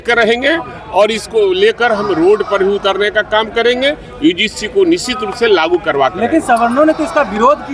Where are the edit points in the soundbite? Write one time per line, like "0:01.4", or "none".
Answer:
none

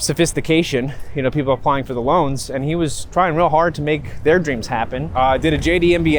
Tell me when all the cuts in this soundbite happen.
0:05.0

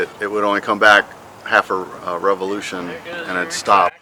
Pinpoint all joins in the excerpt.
none

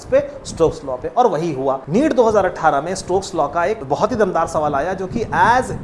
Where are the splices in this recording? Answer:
0:01.8
0:03.8

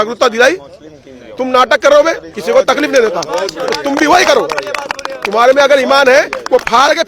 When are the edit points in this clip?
0:02.3

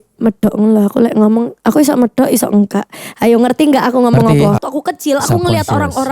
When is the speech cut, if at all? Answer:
0:04.6

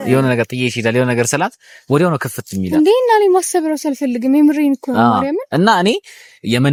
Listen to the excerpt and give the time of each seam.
none

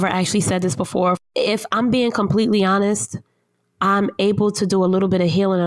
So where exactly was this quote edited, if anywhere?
0:01.2

